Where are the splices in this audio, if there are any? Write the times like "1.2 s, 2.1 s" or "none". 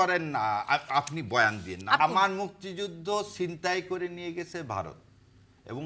2.0 s